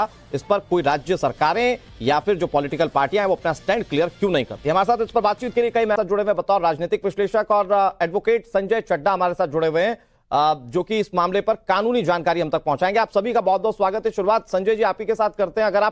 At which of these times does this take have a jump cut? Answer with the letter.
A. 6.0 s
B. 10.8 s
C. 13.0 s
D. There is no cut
A